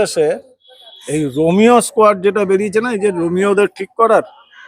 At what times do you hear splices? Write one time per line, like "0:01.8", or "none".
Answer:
none